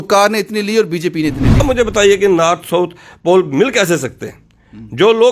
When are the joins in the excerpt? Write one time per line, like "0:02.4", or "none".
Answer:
0:01.6